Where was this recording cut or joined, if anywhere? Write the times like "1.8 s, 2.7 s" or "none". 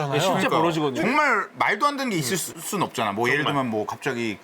1.0 s